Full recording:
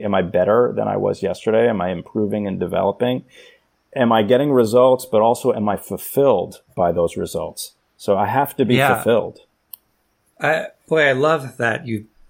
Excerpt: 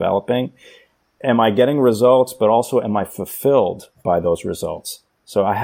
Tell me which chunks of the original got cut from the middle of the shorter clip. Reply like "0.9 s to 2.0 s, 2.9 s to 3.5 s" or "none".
none